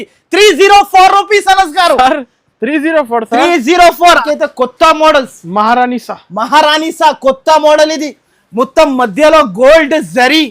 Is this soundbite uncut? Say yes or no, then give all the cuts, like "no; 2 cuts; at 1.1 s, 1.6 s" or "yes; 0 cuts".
no; 1 cut; at 4.2 s